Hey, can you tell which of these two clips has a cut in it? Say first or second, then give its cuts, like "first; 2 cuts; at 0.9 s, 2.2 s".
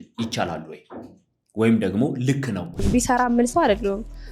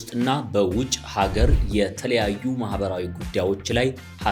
first; 1 cut; at 2.8 s